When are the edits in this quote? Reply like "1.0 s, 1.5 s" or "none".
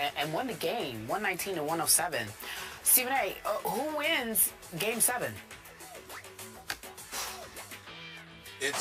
4.1 s